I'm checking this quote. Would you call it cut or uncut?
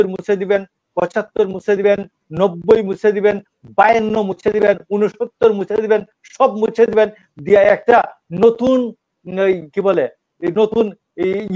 uncut